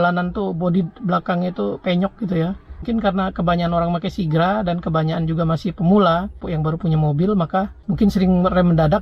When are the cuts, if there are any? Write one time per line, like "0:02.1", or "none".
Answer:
0:02.9